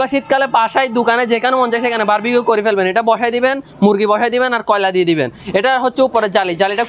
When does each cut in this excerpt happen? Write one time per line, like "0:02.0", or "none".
none

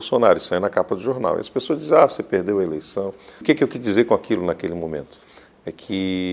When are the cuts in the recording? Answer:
0:03.4

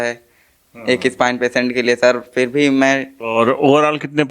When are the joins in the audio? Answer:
0:03.1

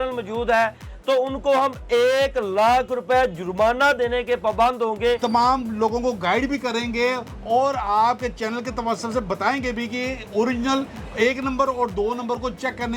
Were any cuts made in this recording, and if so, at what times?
0:05.2

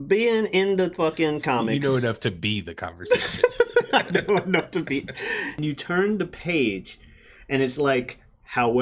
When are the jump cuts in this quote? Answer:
0:05.6

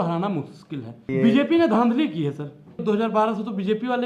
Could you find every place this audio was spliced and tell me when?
0:01.1
0:02.8

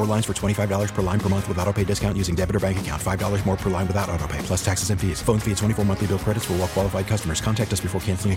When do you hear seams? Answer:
none

